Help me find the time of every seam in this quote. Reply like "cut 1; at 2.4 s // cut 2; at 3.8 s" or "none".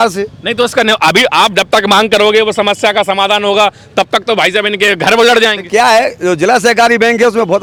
none